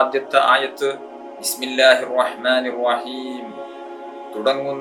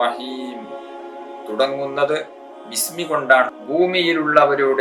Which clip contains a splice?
second; 1 cut; at 3.5 s

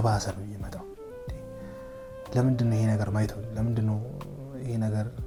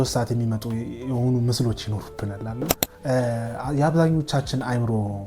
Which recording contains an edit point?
second; 1 cut; at 2.8 s

